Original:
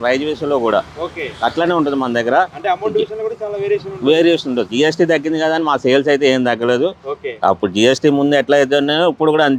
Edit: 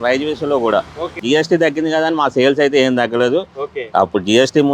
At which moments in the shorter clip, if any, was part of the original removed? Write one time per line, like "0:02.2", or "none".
0:01.2